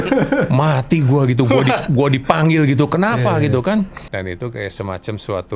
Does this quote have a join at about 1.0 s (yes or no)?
no